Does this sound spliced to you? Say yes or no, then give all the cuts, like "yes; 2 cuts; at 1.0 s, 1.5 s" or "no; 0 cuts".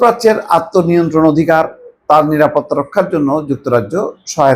no; 0 cuts